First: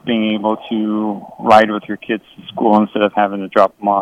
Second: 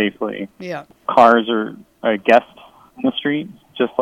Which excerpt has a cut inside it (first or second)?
second